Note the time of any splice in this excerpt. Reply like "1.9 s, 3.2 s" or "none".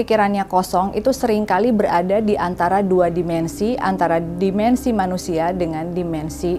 none